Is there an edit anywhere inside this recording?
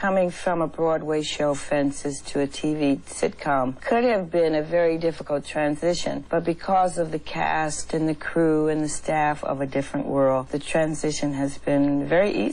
yes; 3 cuts; at 3.8 s, 6.2 s, 10.6 s

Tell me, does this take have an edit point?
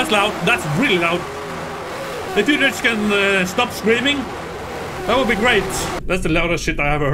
yes; 1 cut; at 5.9 s

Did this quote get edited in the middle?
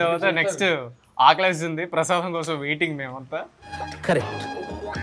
no; 0 cuts

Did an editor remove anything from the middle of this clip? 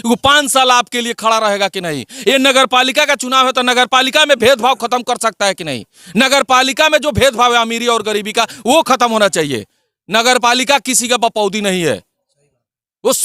no; 0 cuts

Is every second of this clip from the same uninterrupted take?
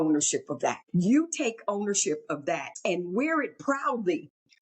no; 2 cuts; at 0.8 s, 2.7 s

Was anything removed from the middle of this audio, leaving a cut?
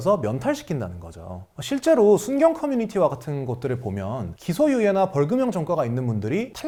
no; 0 cuts

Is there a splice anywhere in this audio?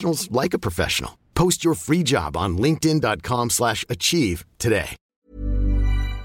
yes; 1 cut; at 5.2 s

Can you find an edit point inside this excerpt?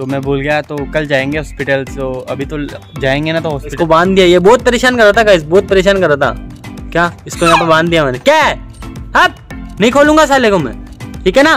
yes; 1 cut; at 3.7 s

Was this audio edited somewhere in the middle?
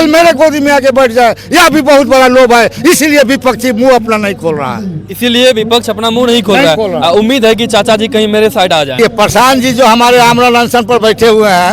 yes; 1 cut; at 8.9 s

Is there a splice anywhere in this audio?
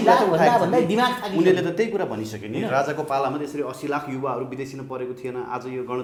no; 0 cuts

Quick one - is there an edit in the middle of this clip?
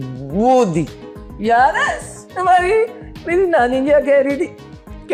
no; 0 cuts

